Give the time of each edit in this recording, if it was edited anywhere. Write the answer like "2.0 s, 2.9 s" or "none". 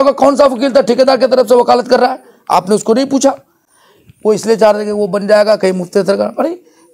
none

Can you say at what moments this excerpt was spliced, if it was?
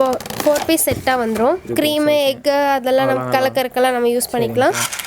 1.7 s

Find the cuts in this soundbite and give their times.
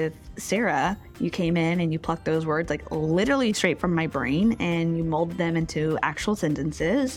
none

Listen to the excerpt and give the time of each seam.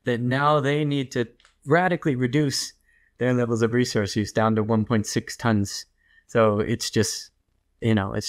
none

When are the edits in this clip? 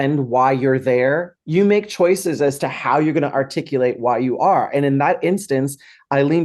1.3 s

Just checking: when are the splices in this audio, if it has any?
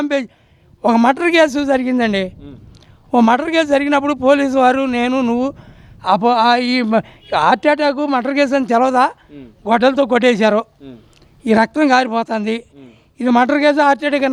none

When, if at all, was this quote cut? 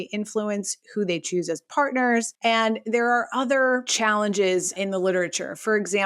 2.3 s, 3.9 s, 4.7 s

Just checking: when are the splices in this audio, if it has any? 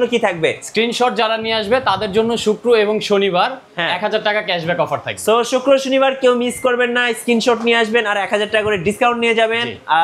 none

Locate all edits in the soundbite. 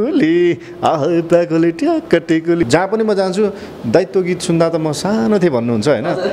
2.6 s

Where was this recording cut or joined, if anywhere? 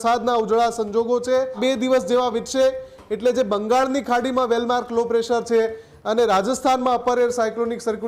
1.6 s

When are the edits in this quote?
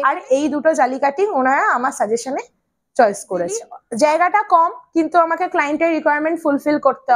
3.8 s

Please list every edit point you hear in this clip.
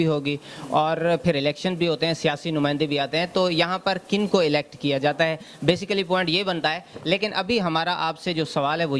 none

